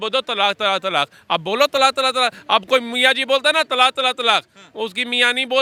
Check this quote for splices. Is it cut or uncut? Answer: uncut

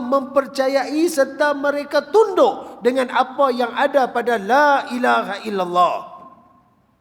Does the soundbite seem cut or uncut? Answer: uncut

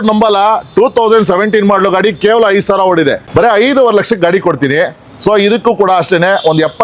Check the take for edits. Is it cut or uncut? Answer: cut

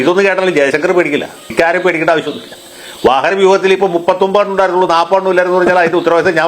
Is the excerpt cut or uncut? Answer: cut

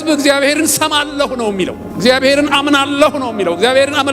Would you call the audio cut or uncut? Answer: cut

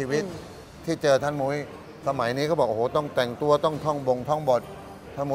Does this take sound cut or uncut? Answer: uncut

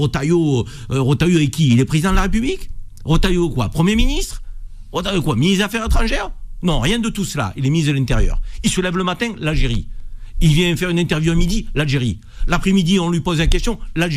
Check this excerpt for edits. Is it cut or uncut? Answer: uncut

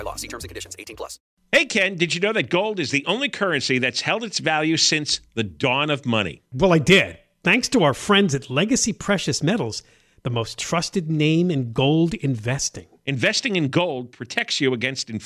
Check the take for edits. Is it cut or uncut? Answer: cut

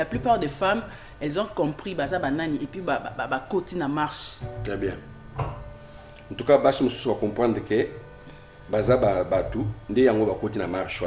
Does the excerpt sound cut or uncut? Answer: uncut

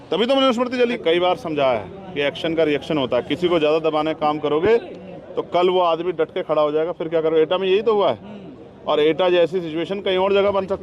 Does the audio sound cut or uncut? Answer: cut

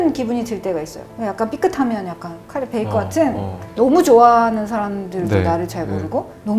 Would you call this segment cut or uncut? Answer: cut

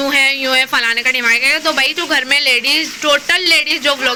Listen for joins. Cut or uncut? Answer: uncut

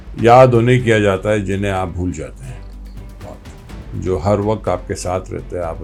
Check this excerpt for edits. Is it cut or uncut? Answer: uncut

